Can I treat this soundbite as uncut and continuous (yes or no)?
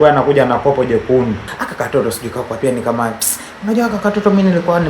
no